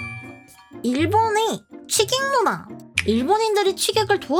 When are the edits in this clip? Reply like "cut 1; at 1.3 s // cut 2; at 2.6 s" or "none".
none